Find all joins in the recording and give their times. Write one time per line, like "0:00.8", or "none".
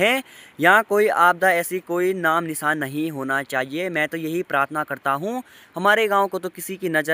none